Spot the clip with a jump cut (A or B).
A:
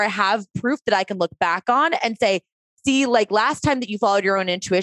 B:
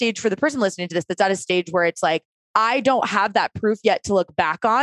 B